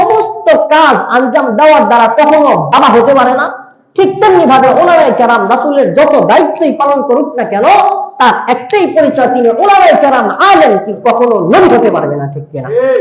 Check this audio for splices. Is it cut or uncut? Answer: cut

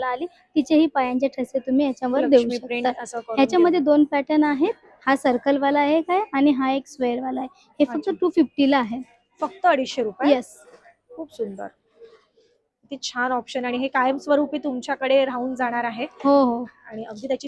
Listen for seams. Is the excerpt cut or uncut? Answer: uncut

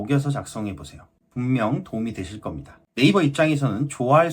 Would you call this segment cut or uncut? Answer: cut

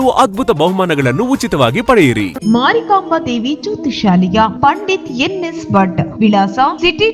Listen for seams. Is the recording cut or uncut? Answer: cut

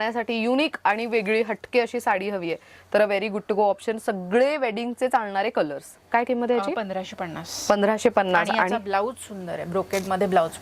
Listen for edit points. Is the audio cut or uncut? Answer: uncut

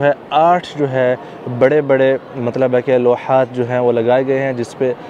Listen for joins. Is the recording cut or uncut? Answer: uncut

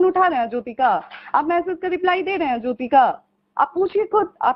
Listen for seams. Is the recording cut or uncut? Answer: uncut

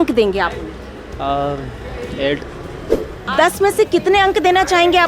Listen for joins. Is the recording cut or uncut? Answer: cut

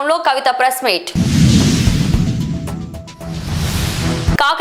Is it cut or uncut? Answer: uncut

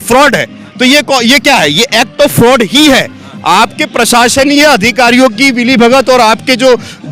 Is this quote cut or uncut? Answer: uncut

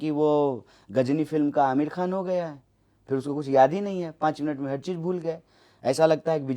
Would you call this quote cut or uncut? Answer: uncut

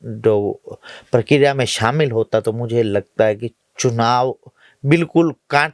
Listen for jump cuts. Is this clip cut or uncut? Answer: uncut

